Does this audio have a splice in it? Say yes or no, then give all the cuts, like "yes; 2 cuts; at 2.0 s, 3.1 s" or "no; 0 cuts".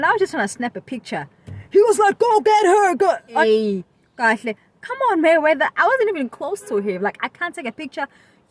yes; 1 cut; at 3.4 s